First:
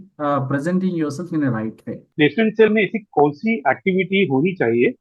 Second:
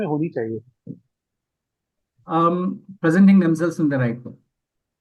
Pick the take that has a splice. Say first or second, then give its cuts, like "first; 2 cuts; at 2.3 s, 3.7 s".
first; 1 cut; at 2.0 s